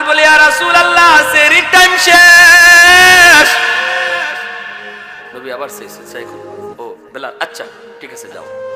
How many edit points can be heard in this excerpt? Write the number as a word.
zero